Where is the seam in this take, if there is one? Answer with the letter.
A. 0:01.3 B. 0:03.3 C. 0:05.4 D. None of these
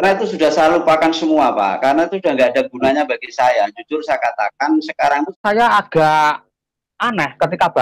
C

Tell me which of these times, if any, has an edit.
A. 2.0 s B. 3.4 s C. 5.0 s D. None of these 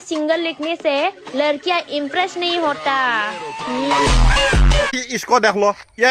C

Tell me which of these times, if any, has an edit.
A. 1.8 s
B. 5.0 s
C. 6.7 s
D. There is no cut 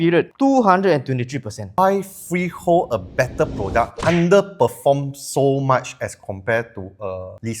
A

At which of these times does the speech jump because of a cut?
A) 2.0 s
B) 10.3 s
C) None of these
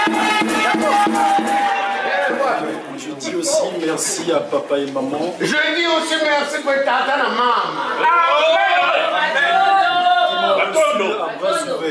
A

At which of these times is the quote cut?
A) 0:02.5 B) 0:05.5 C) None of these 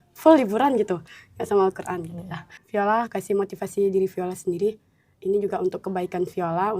A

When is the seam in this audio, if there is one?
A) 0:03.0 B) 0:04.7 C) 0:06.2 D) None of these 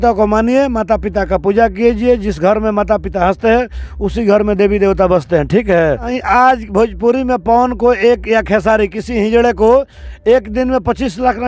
C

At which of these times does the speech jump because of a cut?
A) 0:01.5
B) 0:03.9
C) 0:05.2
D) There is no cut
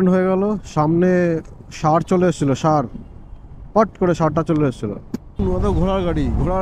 C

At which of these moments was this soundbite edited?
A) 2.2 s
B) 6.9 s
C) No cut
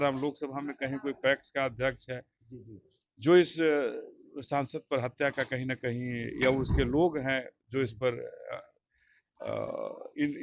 C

